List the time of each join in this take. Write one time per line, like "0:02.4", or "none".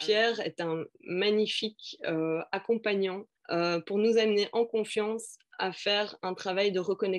0:03.3

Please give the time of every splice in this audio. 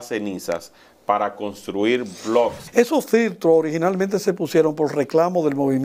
0:02.6

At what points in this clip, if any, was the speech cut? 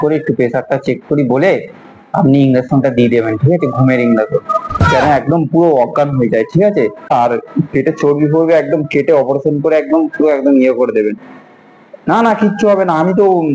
0:07.1

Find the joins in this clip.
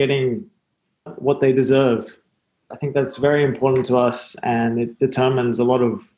0:01.1

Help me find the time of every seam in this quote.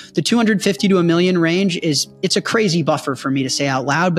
none

